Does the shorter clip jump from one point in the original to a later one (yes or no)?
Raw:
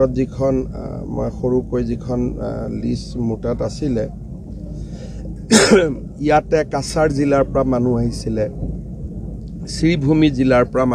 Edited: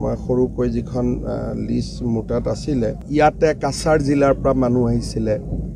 yes